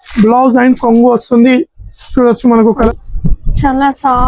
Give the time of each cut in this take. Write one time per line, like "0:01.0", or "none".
0:02.9